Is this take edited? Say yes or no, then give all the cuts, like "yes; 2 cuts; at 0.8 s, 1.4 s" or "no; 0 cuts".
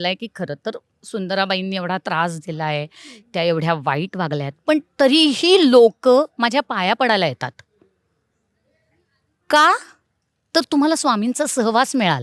no; 0 cuts